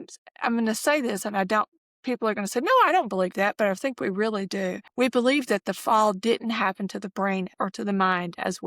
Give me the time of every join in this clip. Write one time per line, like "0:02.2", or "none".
0:04.8
0:07.5